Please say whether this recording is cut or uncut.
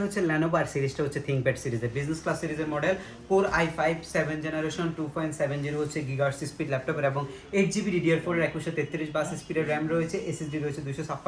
uncut